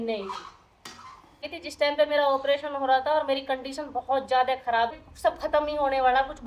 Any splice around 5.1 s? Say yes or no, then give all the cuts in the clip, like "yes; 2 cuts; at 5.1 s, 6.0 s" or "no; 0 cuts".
yes; 2 cuts; at 1.6 s, 5.1 s